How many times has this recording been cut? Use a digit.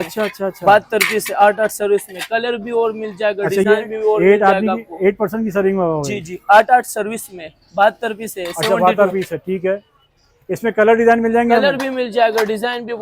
0